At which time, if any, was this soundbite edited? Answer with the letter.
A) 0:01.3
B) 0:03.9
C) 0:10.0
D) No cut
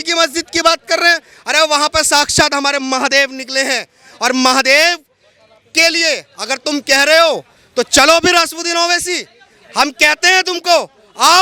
D